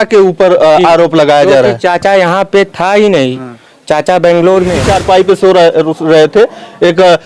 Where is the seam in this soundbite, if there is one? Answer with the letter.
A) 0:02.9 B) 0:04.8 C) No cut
B